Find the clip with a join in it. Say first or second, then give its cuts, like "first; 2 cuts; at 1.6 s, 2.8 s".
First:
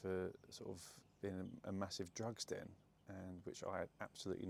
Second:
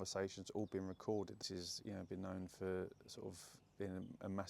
second; 1 cut; at 1.5 s